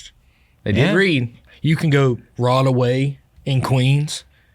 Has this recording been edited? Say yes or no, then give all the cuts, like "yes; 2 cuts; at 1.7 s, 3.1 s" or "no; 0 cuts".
yes; 1 cut; at 1.4 s